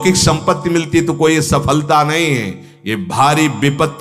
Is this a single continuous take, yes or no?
yes